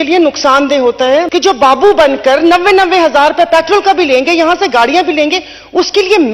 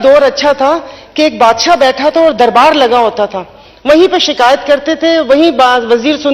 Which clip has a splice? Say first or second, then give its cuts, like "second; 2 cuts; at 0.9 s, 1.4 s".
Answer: first; 1 cut; at 1.3 s